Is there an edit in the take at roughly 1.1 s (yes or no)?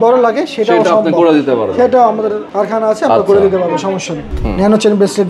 no